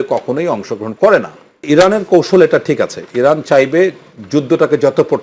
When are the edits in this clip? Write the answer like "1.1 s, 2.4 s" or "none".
1.6 s